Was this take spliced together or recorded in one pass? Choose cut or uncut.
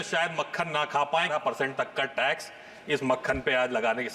cut